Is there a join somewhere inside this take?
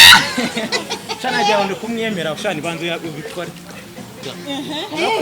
yes; 1 cut; at 4.3 s

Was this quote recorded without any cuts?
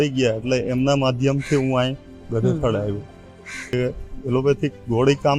no; 1 cut; at 3.7 s

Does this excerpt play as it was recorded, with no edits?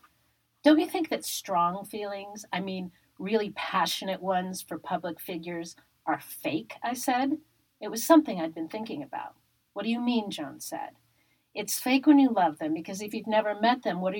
yes; 0 cuts

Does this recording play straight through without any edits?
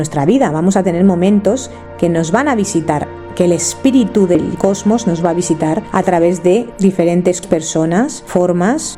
yes; 0 cuts

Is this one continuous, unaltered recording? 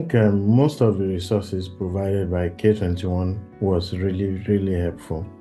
yes; 0 cuts

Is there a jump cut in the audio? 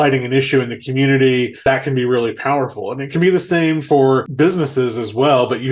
yes; 2 cuts; at 1.6 s, 4.3 s

